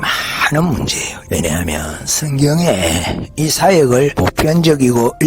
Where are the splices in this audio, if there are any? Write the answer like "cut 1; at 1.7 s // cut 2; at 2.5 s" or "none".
cut 1; at 1.1 s // cut 2; at 4.1 s